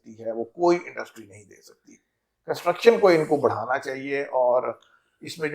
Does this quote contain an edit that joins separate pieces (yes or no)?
no